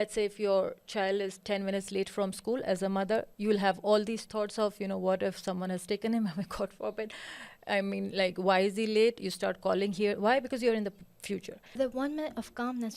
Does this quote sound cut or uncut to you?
cut